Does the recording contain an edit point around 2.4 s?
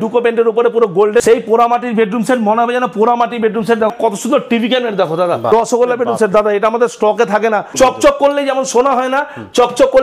no; 4 cuts; at 1.2 s, 3.9 s, 5.5 s, 7.7 s

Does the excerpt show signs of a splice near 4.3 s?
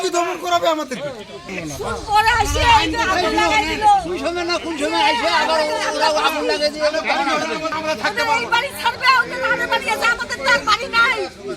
no; 2 cuts; at 1.6 s, 7.7 s

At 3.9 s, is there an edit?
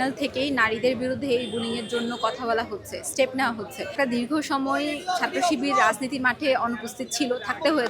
yes; 1 cut; at 3.9 s

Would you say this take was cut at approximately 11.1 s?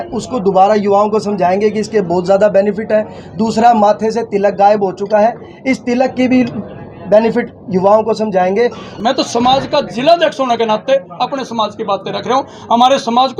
no; 1 cut; at 8.9 s

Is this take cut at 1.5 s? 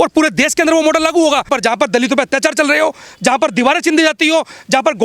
yes; 1 cut; at 1.5 s

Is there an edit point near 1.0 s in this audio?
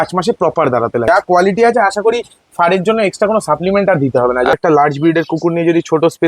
yes; 2 cuts; at 1.0 s, 4.5 s

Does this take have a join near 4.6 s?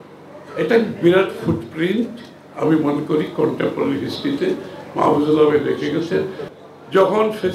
no; 1 cut; at 6.4 s

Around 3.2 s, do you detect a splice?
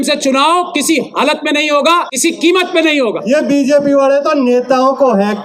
yes; 2 cuts; at 2.1 s, 3.2 s

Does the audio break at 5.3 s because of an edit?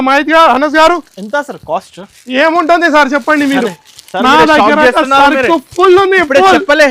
no; 0 cuts

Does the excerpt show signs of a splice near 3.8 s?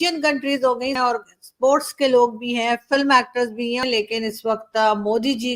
yes; 2 cuts; at 1.0 s, 3.8 s

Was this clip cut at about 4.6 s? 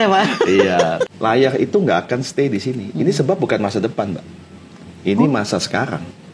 no; 1 cut; at 1.1 s

